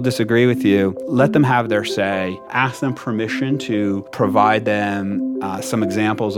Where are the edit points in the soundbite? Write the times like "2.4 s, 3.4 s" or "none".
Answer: 1.0 s, 2.4 s, 4.1 s